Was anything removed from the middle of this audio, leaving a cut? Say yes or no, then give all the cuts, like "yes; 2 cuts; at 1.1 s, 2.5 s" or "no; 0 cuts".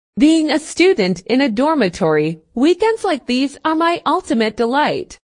yes; 1 cut; at 2.4 s